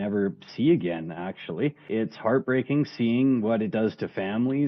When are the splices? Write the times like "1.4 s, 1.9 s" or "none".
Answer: 1.8 s

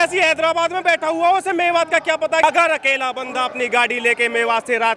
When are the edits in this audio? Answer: 2.4 s

